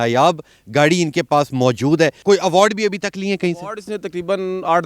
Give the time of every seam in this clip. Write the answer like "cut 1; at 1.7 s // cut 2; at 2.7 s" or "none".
cut 1; at 2.2 s